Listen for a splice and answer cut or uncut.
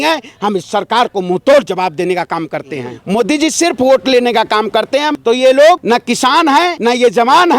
cut